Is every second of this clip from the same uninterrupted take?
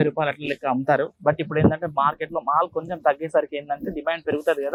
yes; 0 cuts

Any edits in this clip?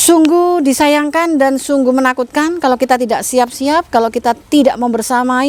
no; 0 cuts

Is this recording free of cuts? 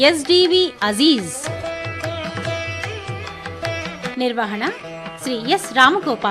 no; 2 cuts; at 1.4 s, 4.0 s

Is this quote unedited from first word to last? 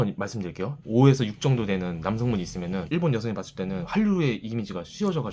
yes; 0 cuts

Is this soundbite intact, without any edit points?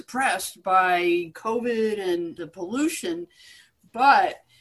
no; 2 cuts; at 1.3 s, 2.4 s

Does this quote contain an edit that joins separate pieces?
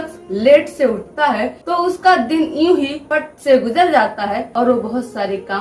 yes; 2 cuts; at 3.0 s, 4.5 s

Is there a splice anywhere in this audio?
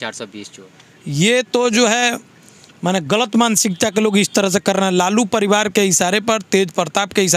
no; 0 cuts

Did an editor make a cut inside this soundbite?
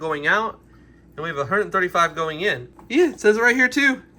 yes; 1 cut; at 2.7 s

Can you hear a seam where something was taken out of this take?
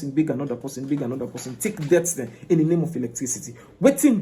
no; 0 cuts

